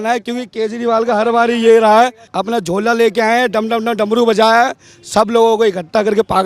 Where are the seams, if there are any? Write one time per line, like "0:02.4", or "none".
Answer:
0:02.3